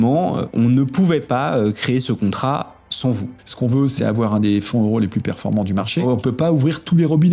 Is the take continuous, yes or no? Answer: no